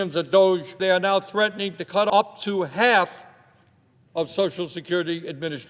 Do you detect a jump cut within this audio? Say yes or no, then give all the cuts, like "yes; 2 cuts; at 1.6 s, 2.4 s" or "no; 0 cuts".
yes; 2 cuts; at 0.8 s, 2.1 s